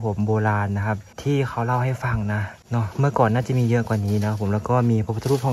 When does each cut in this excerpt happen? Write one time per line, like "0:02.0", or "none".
0:01.1
0:02.6

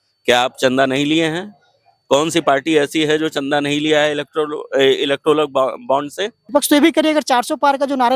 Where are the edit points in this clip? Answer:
0:06.3

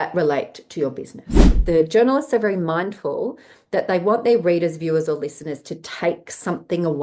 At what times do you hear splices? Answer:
0:01.6

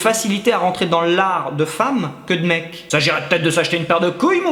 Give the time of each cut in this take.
none

